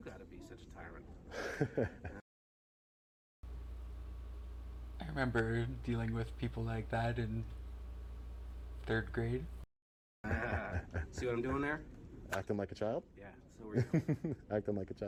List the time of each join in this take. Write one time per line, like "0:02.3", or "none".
none